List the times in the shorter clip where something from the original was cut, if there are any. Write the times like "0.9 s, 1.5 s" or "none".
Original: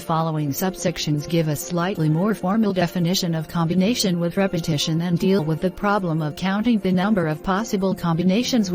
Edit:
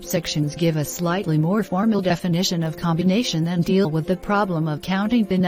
3.3 s